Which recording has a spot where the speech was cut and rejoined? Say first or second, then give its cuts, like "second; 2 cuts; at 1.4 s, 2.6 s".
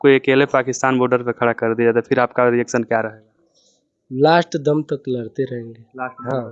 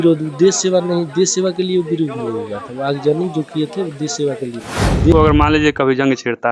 second; 1 cut; at 5.1 s